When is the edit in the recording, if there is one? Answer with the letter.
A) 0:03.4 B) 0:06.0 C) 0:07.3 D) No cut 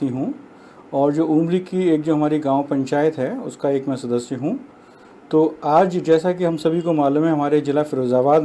B